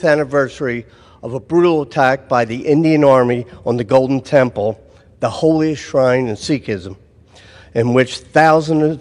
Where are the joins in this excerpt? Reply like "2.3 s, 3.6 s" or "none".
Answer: none